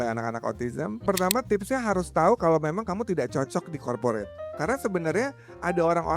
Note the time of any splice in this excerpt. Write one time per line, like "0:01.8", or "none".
0:01.0
0:04.5